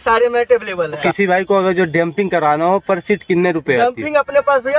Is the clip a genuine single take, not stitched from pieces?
no; 1 cut; at 1.0 s

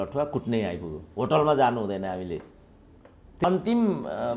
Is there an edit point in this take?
yes; 1 cut; at 3.4 s

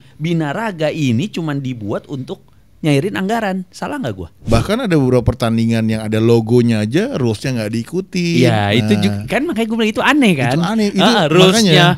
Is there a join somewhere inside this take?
yes; 1 cut; at 4.5 s

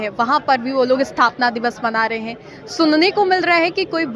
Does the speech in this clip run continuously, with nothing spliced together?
yes; 0 cuts

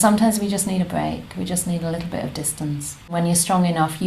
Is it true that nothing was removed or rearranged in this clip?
no; 1 cut; at 3.1 s

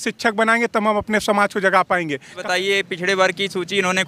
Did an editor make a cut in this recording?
yes; 1 cut; at 2.3 s

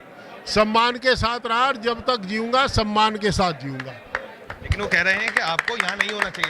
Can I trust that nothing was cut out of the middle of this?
yes; 0 cuts

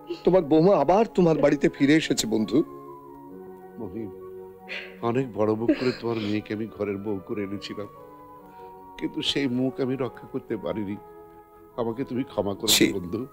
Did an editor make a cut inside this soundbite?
no; 0 cuts

